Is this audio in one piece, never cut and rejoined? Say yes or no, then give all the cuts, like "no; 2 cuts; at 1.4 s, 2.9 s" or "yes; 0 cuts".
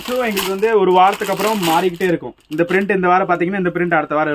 yes; 0 cuts